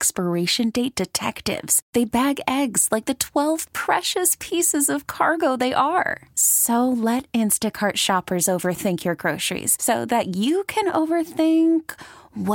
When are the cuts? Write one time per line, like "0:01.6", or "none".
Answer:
none